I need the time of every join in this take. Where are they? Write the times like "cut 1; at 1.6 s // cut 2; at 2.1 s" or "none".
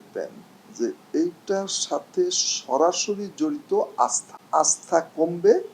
cut 1; at 4.3 s